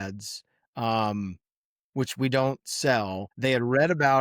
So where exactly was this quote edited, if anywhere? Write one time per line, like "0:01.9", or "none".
0:03.3